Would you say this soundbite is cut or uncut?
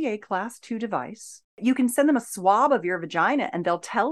cut